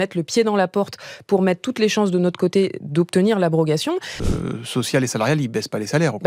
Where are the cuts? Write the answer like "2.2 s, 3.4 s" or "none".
4.2 s